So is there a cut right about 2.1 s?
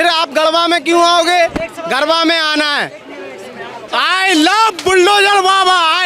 no; 1 cut; at 3.8 s

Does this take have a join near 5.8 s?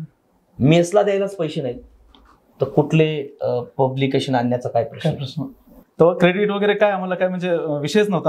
yes; 1 cut; at 5.8 s

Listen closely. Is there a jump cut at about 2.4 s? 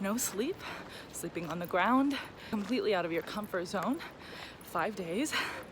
yes; 1 cut; at 2.4 s

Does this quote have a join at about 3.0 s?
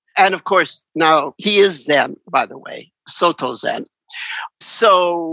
no; 2 cuts; at 1.4 s, 4.6 s

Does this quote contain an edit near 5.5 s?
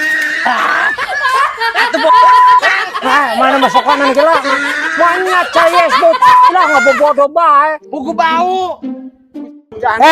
no; 1 cut; at 8.8 s

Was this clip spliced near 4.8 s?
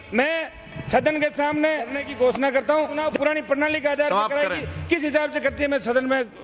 no; 2 cuts; at 2.0 s, 3.0 s

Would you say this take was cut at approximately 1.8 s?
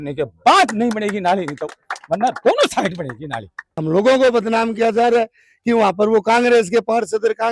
no; 1 cut; at 3.7 s

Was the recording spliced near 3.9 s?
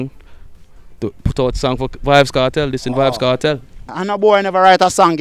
yes; 1 cut; at 3.9 s

